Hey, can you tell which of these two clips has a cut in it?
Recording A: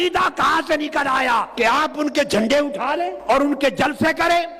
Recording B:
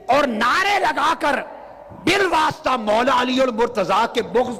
A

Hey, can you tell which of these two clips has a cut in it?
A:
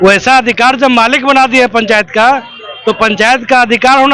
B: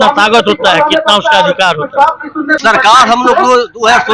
B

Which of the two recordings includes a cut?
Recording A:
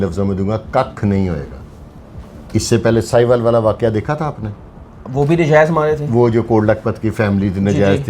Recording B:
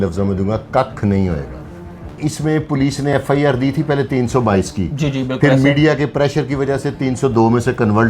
B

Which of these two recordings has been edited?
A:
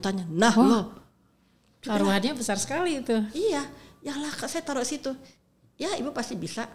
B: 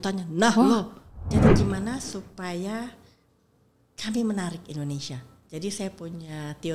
B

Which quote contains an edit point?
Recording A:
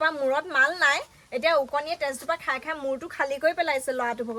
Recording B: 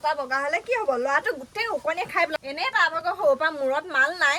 B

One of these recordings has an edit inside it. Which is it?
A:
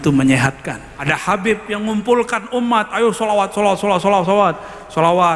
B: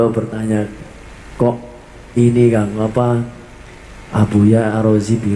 A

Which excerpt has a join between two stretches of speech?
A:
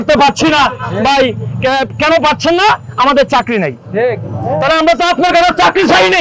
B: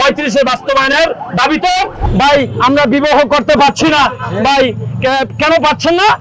B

